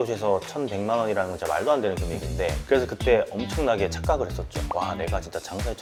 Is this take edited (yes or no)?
no